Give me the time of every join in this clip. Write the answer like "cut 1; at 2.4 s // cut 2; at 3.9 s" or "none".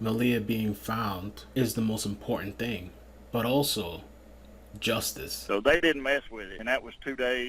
cut 1; at 1.3 s // cut 2; at 5.4 s